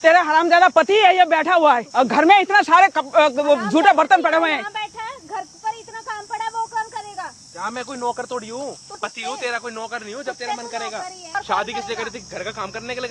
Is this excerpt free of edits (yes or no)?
no